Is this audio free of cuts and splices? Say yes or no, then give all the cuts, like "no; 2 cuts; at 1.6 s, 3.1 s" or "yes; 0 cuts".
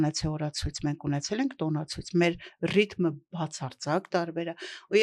yes; 0 cuts